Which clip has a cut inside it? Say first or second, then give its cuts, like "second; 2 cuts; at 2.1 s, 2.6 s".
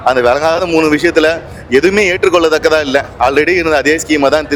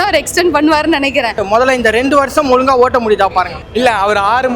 second; 2 cuts; at 1.4 s, 3.6 s